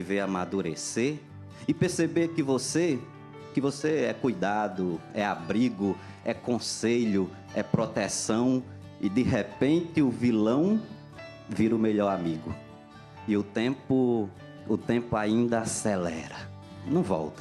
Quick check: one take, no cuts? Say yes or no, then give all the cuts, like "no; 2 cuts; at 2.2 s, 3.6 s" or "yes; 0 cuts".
no; 1 cut; at 9.1 s